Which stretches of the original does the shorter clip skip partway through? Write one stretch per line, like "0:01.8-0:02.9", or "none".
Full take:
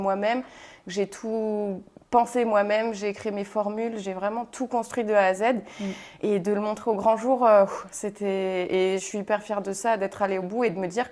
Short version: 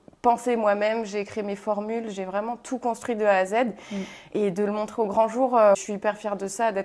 0:07.7-0:09.1